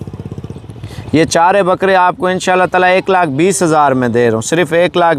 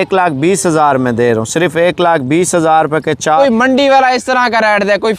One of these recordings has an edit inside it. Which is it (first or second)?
second